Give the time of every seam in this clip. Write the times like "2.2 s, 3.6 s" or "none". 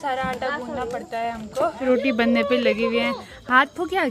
1.8 s